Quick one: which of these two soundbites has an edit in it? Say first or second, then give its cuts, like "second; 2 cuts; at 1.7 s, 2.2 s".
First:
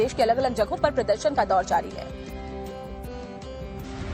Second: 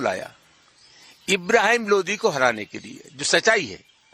first; 1 cut; at 3.2 s